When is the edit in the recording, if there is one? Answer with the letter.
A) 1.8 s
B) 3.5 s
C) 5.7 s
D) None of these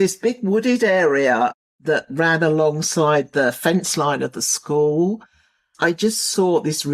C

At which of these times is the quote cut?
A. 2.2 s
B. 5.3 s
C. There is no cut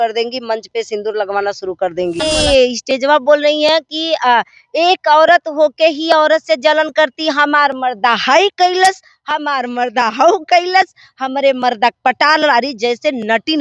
A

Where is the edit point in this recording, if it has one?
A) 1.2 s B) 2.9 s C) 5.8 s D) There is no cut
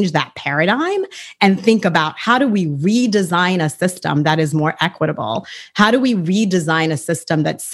D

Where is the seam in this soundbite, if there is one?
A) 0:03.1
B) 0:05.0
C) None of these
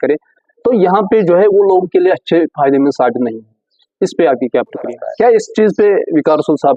B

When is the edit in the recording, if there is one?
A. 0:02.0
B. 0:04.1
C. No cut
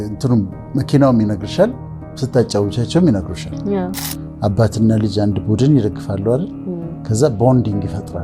B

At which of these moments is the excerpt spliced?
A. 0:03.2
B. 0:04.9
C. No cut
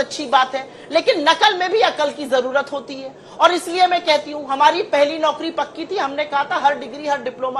C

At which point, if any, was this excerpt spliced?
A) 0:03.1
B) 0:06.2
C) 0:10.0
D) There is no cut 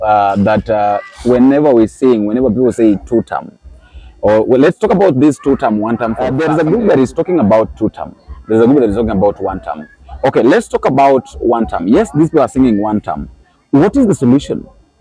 B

